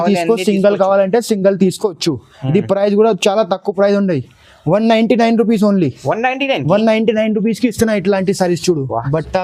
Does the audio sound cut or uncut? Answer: uncut